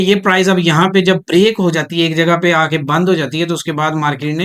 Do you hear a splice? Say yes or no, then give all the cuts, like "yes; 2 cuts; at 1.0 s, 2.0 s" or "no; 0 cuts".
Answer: no; 0 cuts